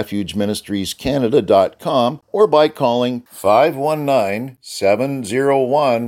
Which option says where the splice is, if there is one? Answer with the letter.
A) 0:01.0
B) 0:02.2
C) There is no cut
B